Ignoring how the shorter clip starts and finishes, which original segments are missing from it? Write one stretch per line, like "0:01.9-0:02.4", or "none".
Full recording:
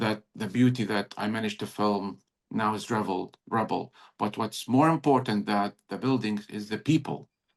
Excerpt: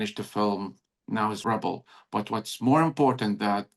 0:02.8-0:03.4